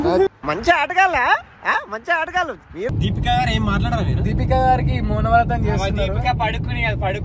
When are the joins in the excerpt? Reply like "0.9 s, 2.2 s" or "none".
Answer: 2.9 s